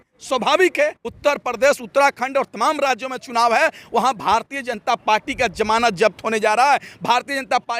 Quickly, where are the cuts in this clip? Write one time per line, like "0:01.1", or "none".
0:01.2